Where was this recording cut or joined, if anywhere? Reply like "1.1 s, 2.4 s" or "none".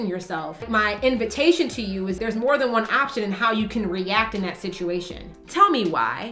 5.3 s